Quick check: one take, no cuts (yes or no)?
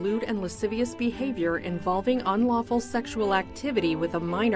yes